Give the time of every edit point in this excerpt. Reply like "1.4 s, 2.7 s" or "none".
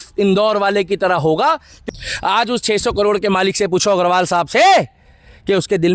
1.7 s